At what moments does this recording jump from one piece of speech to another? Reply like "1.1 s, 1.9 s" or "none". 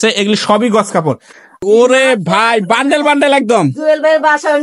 1.6 s